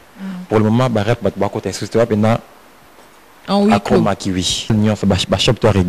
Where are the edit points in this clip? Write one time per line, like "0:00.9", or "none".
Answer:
0:04.7